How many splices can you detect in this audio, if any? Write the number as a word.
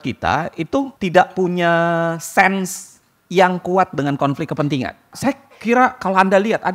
two